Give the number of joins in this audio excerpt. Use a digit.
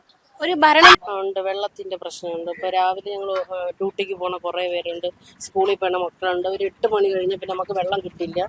1